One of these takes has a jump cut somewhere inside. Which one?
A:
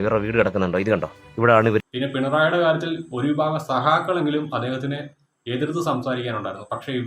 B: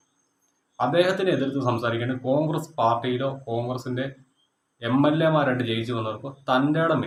A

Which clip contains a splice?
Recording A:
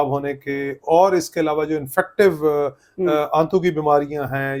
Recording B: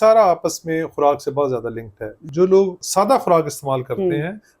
B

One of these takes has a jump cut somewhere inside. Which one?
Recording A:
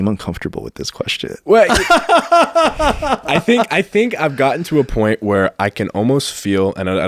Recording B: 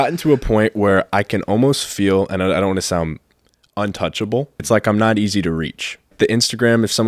B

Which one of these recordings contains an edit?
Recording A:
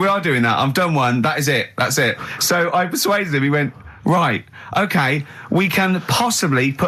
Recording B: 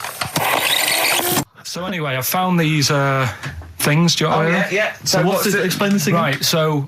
B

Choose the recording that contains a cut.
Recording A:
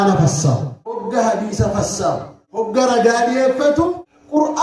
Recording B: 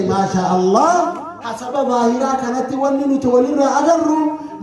A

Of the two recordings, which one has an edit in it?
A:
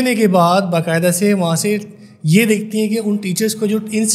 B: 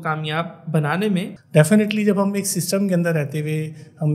B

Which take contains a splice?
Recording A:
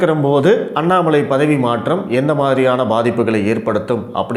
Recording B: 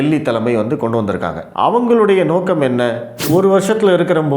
B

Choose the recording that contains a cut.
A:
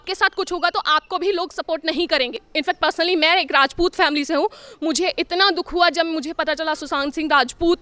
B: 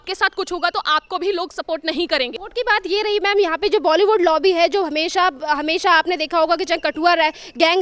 A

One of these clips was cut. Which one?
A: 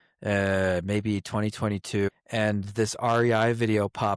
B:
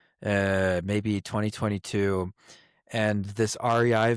A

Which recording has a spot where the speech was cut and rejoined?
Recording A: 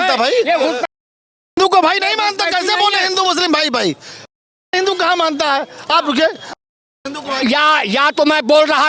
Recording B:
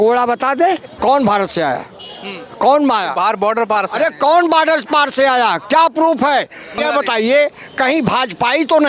B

